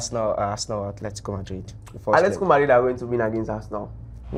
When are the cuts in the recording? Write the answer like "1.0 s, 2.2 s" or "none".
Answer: none